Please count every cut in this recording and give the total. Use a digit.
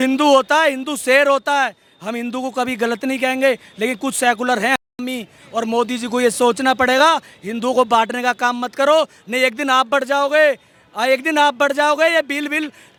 0